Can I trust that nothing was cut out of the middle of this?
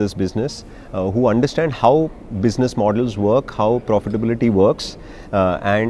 yes; 0 cuts

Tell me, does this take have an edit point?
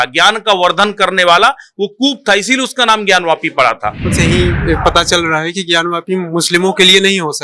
yes; 1 cut; at 4.1 s

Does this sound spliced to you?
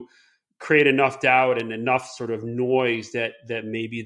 no; 0 cuts

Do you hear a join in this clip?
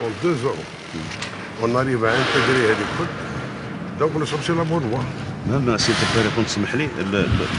no; 0 cuts

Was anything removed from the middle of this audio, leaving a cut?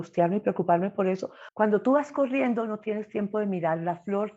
yes; 1 cut; at 1.4 s

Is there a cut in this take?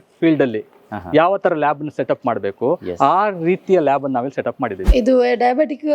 yes; 1 cut; at 4.8 s

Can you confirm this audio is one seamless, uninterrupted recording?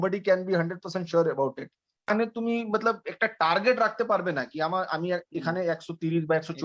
no; 1 cut; at 2.1 s

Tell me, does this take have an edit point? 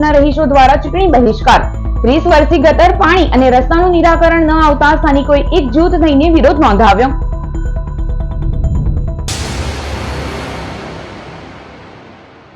yes; 1 cut; at 9.2 s

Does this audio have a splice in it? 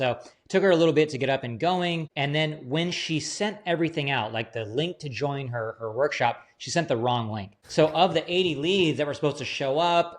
yes; 1 cut; at 2.1 s

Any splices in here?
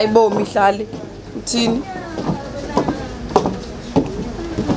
no; 0 cuts

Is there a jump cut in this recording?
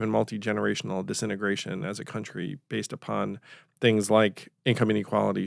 yes; 1 cut; at 4.5 s

